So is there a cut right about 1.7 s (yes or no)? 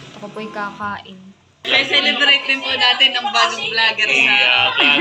yes